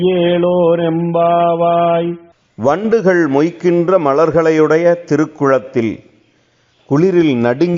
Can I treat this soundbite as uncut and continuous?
no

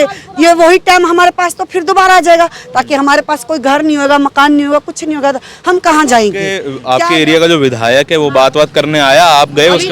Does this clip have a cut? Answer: yes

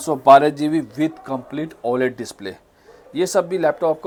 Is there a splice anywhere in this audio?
no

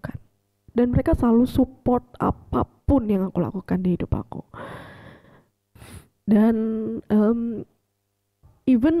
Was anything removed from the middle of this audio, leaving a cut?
no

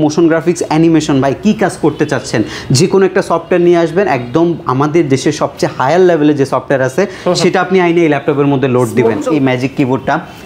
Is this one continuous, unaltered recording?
no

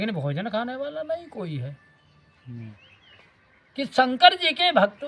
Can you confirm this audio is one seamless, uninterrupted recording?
no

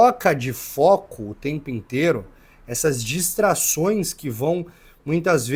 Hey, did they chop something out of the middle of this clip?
no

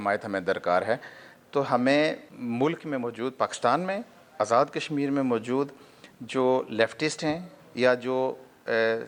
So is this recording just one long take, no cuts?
no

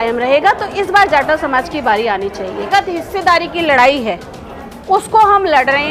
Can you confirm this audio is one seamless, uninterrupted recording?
no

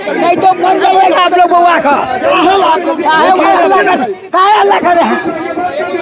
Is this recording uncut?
yes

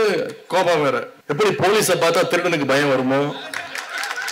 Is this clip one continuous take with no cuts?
no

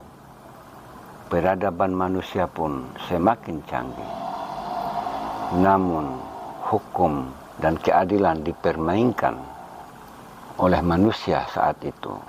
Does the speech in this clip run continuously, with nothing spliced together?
yes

